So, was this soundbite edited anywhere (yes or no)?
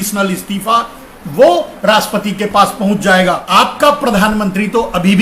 yes